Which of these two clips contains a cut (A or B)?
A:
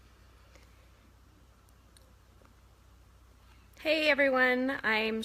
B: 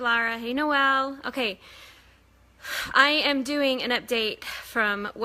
B